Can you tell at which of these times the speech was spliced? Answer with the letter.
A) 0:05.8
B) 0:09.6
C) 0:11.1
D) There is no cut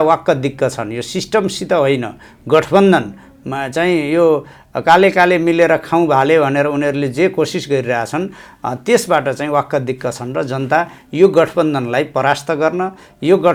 D